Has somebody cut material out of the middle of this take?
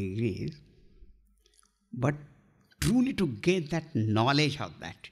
no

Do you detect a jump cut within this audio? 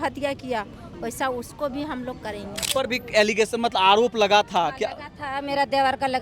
yes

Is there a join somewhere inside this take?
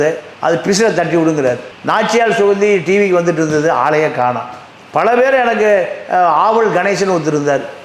no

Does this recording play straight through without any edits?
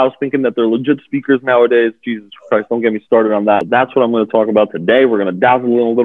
no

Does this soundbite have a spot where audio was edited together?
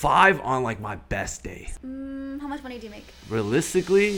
yes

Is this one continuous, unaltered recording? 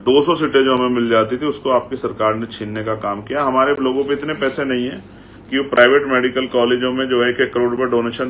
yes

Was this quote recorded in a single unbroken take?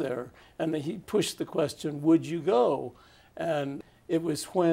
no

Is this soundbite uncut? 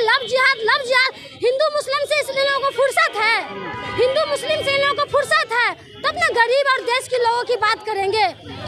yes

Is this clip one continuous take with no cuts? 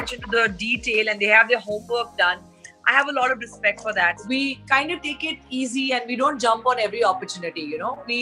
no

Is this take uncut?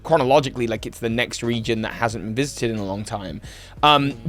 yes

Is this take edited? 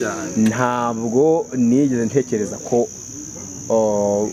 no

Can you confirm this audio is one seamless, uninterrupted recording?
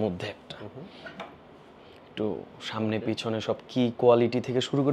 yes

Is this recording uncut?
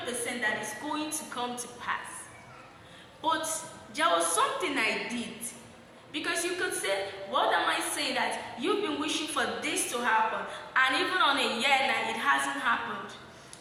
yes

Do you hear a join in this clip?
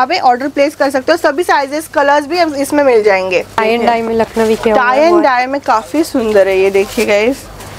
yes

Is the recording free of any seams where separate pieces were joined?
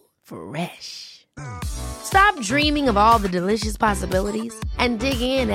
yes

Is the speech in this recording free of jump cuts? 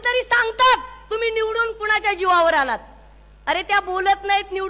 yes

